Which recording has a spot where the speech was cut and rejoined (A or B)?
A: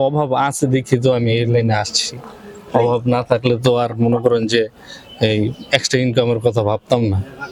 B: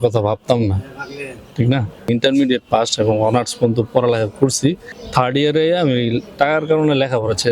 B